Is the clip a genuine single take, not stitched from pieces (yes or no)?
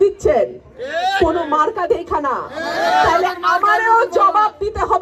yes